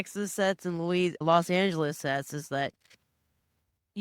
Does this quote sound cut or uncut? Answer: cut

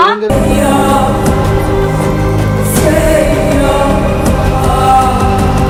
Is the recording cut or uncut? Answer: uncut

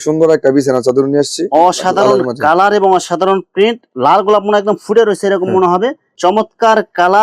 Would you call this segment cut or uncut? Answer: cut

